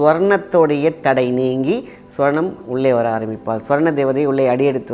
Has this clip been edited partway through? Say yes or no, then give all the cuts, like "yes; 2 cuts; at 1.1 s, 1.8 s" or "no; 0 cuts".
no; 0 cuts